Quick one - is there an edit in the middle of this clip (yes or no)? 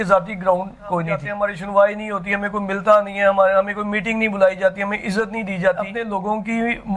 yes